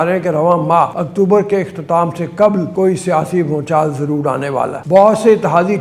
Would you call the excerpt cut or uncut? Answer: cut